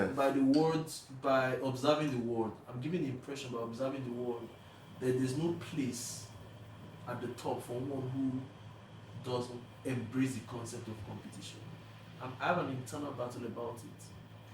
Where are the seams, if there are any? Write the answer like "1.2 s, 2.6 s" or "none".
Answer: 9.7 s